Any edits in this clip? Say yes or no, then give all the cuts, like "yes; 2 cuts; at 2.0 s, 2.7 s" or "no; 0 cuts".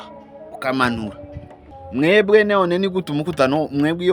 yes; 1 cut; at 1.7 s